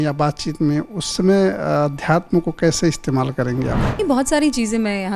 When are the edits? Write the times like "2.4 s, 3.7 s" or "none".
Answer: 4.0 s